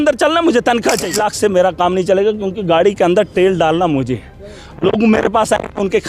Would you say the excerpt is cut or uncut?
cut